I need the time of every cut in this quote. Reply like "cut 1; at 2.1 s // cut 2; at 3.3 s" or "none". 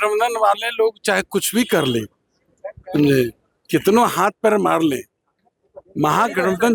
none

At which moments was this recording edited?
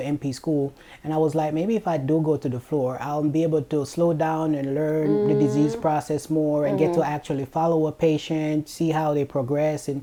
none

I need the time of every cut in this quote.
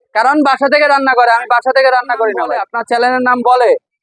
cut 1; at 2.7 s

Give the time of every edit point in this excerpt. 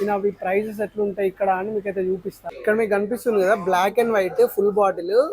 cut 1; at 2.4 s

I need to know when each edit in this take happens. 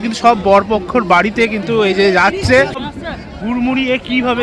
cut 1; at 2.8 s

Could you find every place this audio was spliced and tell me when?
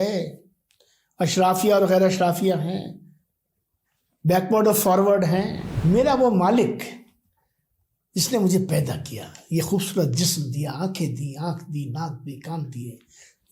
cut 1; at 5.6 s

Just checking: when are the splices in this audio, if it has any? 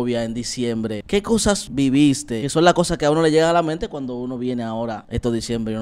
cut 1; at 1.1 s // cut 2; at 2.4 s // cut 3; at 5.0 s

